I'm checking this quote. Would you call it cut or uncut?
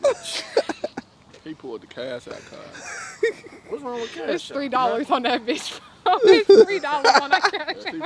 uncut